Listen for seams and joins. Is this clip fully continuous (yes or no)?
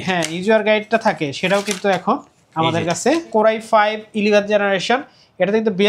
no